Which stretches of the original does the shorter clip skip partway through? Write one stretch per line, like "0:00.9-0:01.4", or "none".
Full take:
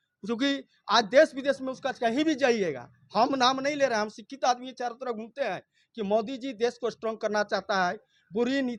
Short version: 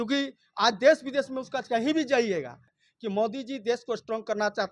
0:03.0-0:05.6